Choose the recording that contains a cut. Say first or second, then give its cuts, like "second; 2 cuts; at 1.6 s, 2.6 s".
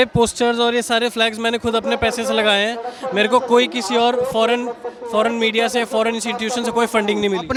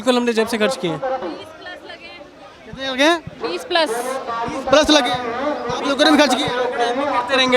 second; 1 cut; at 1.2 s